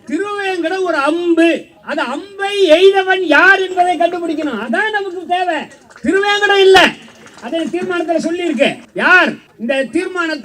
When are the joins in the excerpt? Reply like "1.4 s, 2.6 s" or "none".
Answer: 1.8 s, 8.9 s, 9.5 s